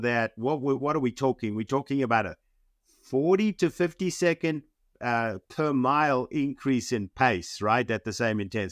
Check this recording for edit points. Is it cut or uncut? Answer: uncut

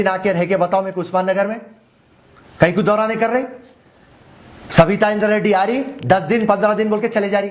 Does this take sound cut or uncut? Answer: uncut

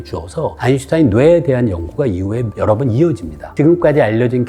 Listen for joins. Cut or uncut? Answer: cut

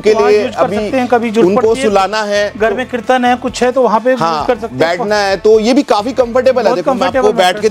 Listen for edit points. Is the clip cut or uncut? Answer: uncut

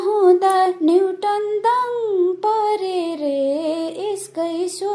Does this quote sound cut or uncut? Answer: uncut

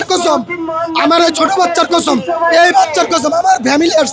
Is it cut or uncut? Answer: uncut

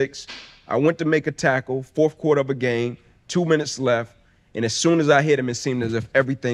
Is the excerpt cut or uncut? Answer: uncut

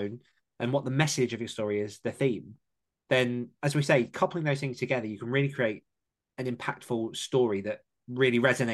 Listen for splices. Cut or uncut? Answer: uncut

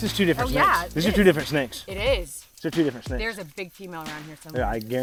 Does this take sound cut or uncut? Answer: uncut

